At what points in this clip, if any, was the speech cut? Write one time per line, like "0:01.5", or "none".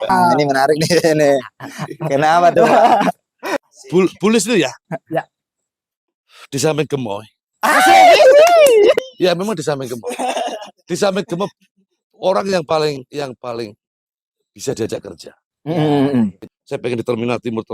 0:03.5
0:16.4